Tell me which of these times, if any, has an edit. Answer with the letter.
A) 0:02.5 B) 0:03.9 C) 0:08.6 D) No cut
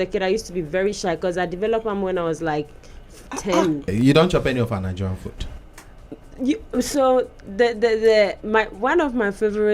B